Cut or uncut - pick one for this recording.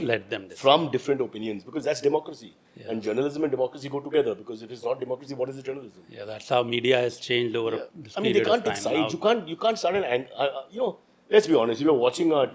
uncut